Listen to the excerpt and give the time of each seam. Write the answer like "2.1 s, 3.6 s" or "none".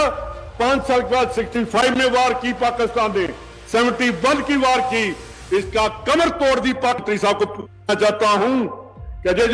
7.0 s